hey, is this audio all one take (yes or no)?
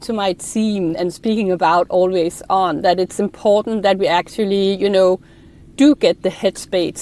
no